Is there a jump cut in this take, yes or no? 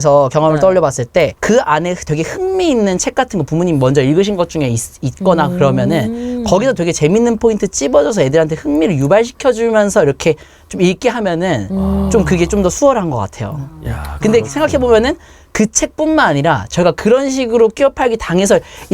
no